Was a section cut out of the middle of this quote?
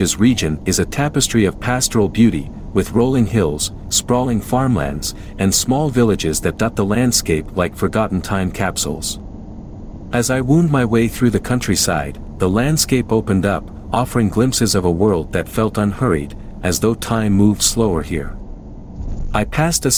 no; 0 cuts

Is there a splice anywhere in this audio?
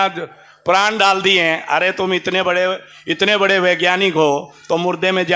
no; 0 cuts

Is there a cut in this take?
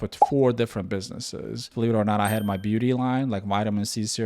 yes; 1 cut; at 1.7 s

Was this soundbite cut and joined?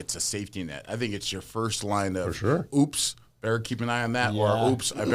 no; 0 cuts

